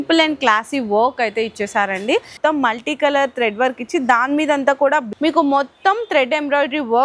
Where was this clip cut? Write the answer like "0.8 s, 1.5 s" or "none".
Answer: 2.3 s, 5.1 s